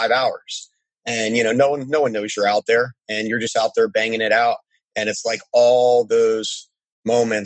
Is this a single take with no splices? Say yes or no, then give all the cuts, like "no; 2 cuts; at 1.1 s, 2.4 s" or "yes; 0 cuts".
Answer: yes; 0 cuts